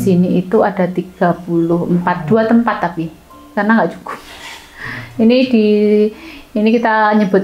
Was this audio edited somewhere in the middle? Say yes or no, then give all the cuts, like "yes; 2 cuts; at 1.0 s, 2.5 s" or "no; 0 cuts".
no; 0 cuts